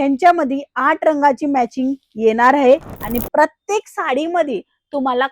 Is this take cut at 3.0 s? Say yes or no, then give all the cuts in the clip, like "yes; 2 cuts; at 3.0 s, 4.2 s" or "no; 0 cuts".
yes; 1 cut; at 3.0 s